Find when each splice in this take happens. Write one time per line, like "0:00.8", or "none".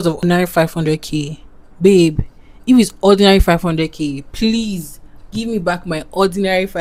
none